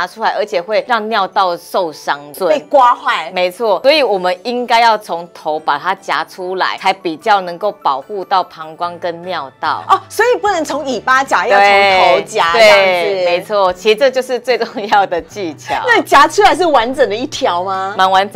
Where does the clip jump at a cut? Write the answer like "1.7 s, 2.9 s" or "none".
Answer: 0.9 s, 2.3 s, 3.8 s, 6.8 s